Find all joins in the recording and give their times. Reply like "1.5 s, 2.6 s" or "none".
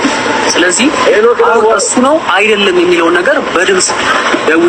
none